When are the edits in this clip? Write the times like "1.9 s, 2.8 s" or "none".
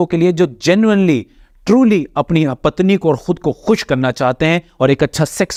none